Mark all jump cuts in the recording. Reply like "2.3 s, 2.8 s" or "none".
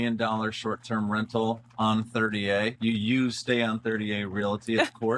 2.8 s